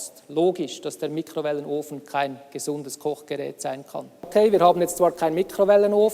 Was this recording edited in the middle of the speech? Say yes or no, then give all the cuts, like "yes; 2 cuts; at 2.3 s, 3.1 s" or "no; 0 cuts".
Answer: yes; 1 cut; at 4.3 s